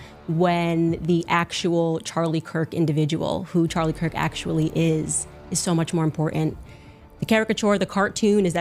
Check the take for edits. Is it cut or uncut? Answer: uncut